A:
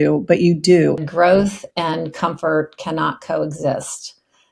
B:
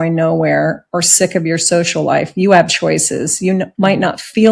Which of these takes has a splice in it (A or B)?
A